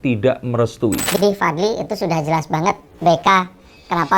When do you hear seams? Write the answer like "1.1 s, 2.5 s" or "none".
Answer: 1.1 s